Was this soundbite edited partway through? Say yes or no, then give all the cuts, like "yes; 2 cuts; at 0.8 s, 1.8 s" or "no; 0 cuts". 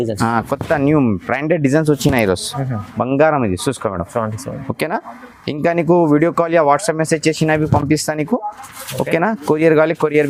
no; 0 cuts